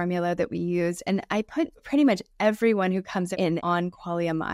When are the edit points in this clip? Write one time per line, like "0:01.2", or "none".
0:03.3